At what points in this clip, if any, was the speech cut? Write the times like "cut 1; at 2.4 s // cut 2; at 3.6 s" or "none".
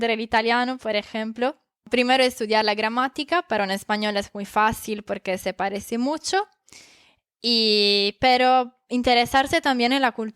cut 1; at 1.8 s